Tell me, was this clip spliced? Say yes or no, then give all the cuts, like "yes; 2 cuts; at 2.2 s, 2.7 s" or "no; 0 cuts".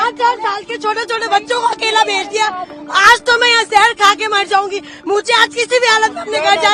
no; 0 cuts